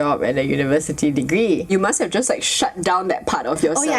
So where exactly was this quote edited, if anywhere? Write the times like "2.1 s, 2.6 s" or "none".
1.7 s